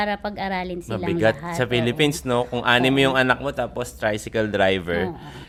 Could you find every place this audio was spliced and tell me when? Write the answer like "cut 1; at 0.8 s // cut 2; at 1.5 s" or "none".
none

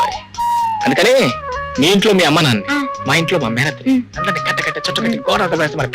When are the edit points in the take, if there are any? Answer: none

